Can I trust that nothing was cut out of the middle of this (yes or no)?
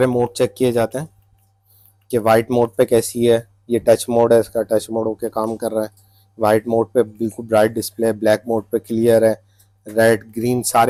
yes